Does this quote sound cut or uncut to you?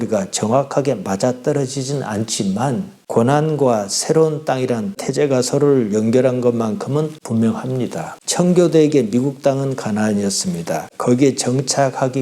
cut